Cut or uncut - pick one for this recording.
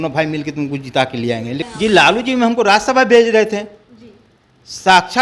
cut